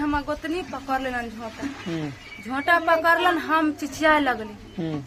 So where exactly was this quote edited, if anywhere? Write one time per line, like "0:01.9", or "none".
none

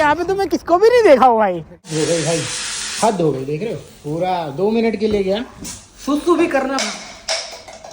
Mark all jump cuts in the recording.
0:01.8

